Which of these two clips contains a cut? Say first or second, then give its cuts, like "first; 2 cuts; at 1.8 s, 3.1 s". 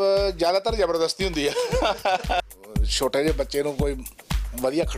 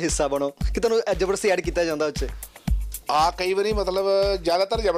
first; 1 cut; at 2.5 s